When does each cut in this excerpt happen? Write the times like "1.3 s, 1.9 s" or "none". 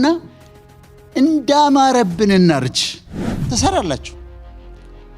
3.4 s